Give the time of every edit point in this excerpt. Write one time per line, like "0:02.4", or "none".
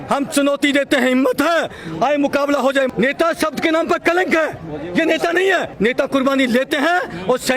0:02.9
0:05.7